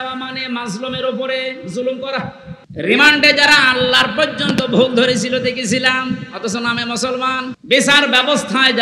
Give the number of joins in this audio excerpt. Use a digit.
2